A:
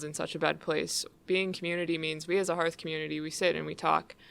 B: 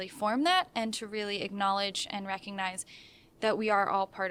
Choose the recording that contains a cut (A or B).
A